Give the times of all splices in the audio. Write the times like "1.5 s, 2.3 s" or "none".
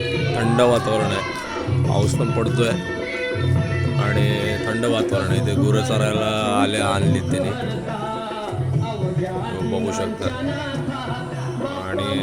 none

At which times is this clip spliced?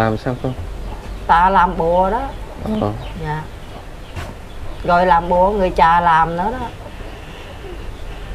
none

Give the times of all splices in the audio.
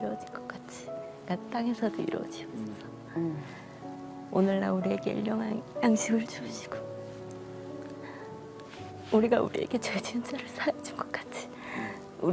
none

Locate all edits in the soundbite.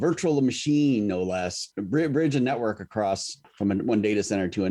1.7 s, 3.4 s

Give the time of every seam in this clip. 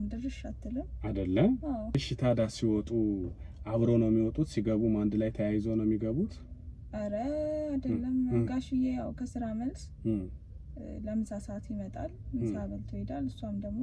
2.0 s

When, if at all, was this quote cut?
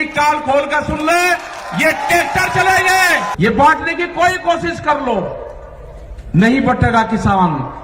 3.3 s

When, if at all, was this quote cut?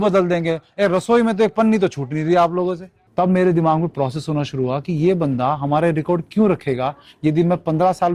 2.9 s

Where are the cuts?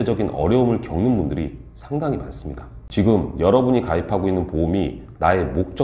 2.8 s

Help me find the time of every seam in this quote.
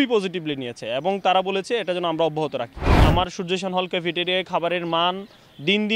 2.9 s

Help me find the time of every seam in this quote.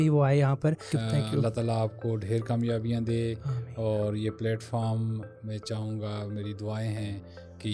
0.9 s

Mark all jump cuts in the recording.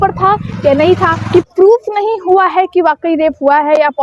1.2 s

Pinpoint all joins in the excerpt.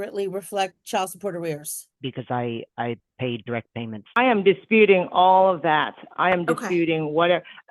2.0 s, 4.2 s

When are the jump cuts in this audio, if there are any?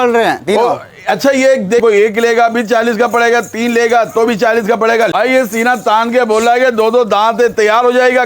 1.8 s, 5.3 s

